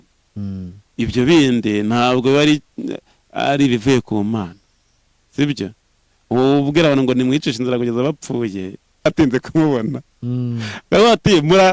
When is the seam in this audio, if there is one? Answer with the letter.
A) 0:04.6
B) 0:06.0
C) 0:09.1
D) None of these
C